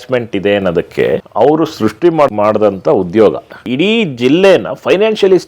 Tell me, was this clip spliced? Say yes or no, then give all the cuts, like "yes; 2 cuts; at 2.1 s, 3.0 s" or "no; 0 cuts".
yes; 3 cuts; at 1.3 s, 2.3 s, 3.6 s